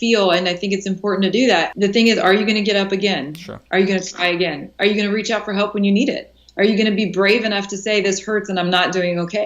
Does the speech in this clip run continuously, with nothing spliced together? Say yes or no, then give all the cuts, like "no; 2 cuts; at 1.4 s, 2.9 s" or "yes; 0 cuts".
no; 1 cut; at 1.7 s